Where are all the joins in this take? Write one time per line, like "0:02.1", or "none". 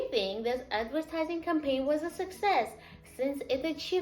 0:02.9